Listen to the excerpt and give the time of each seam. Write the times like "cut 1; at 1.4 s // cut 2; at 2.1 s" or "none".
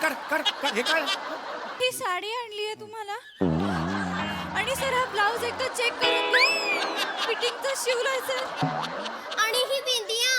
cut 1; at 1.8 s